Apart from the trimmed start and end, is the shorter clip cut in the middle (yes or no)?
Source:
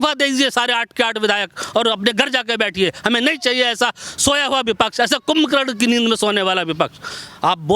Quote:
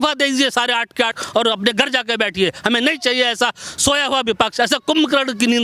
yes